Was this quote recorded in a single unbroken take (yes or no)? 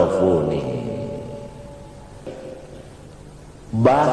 no